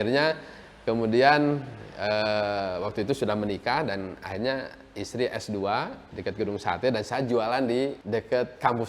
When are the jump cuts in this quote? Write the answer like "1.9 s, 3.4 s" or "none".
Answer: 6.1 s, 8.0 s